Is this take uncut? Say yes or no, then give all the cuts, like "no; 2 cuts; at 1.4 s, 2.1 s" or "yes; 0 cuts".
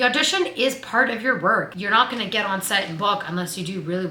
no; 1 cut; at 1.7 s